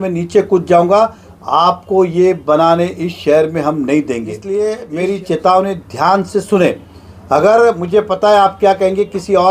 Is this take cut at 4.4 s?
yes; 1 cut; at 4.4 s

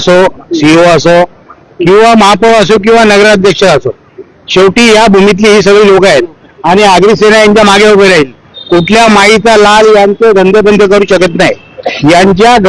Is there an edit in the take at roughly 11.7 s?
no; 0 cuts

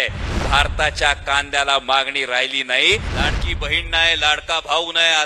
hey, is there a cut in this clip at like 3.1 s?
yes; 1 cut; at 3.1 s

